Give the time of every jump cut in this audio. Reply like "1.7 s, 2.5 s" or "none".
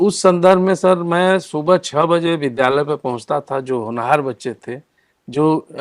none